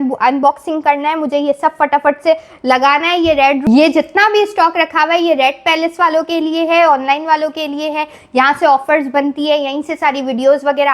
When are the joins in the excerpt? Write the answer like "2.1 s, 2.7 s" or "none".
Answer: none